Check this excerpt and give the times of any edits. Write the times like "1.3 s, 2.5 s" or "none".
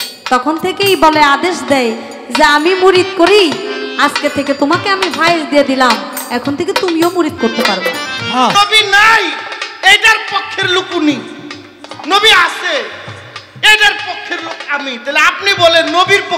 8.5 s